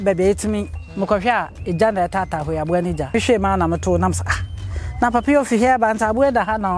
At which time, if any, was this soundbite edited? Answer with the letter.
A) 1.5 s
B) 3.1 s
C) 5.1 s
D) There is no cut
B